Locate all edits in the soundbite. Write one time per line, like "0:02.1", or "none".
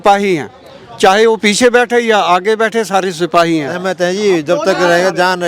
0:03.8